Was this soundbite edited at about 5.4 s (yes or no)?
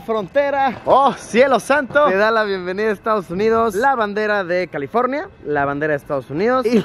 no